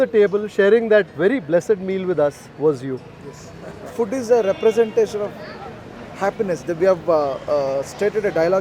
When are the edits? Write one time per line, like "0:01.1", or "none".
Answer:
0:03.7